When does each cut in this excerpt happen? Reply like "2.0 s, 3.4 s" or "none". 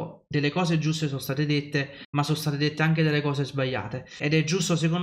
2.0 s, 4.2 s